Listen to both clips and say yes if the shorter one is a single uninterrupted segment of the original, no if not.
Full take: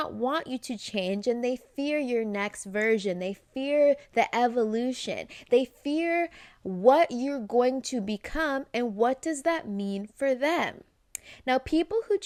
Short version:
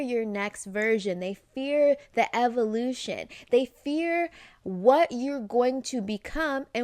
yes